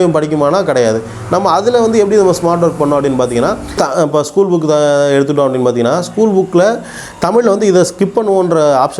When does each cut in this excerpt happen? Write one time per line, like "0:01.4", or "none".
0:03.7